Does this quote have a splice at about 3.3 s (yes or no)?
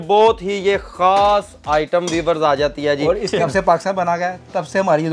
yes